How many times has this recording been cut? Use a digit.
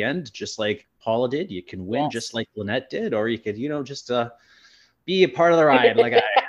1